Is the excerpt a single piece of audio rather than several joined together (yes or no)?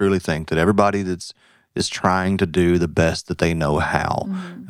yes